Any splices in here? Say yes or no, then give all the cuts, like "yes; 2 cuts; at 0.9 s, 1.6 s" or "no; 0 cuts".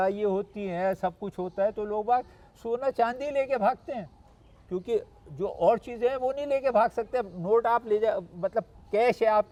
no; 0 cuts